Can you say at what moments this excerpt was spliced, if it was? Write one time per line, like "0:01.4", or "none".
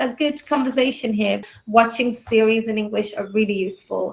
0:01.5